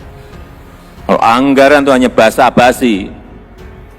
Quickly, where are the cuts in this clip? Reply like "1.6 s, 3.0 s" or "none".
1.1 s

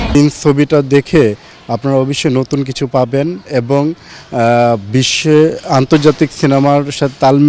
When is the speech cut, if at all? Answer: none

